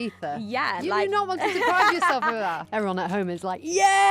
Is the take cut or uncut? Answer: cut